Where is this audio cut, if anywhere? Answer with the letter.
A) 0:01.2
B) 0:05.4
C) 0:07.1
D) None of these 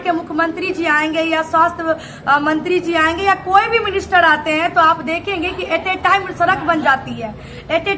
D